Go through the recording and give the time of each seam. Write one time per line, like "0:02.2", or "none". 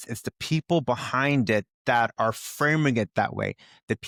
none